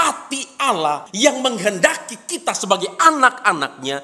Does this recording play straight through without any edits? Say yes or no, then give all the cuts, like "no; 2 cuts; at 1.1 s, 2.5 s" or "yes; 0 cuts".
no; 1 cut; at 1.1 s